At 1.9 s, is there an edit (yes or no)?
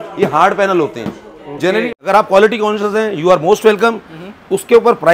yes